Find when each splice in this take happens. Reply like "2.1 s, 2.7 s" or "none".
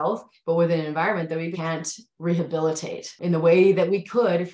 1.6 s, 3.1 s